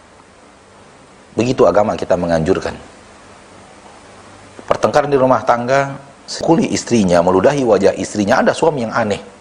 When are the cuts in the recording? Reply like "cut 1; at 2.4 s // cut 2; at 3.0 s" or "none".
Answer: cut 1; at 6.4 s